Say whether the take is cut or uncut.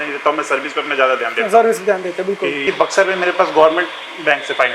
cut